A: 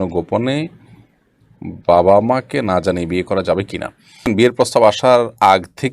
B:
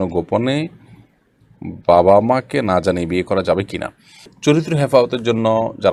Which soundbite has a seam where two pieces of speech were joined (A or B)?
A